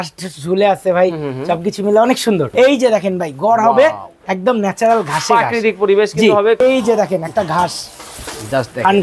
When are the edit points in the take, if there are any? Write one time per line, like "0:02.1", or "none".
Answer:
0:02.5
0:06.6